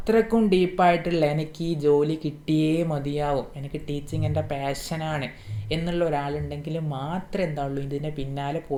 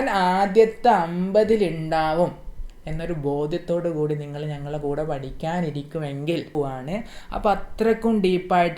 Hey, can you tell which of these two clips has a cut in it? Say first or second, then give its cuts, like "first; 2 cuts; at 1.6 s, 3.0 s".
second; 1 cut; at 6.5 s